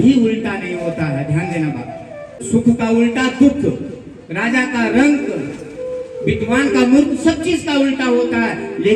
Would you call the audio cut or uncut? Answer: uncut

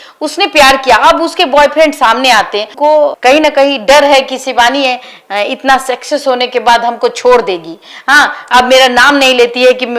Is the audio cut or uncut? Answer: uncut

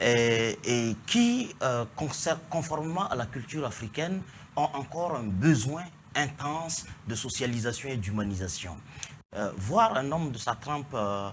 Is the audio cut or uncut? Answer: uncut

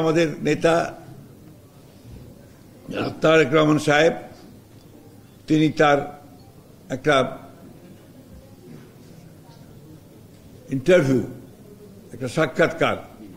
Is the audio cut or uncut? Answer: uncut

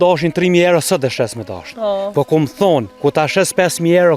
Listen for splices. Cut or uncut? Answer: cut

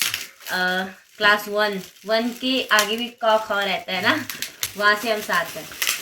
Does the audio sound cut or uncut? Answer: cut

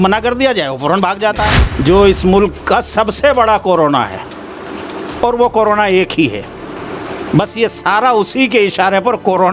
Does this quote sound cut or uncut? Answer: cut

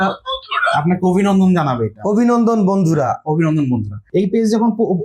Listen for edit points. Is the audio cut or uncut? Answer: cut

